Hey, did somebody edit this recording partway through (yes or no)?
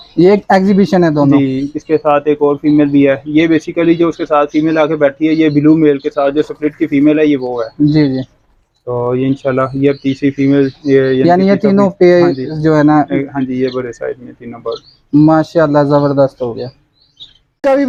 no